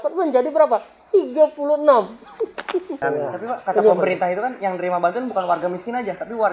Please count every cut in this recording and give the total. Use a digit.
1